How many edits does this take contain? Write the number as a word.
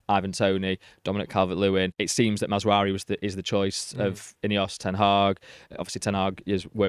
one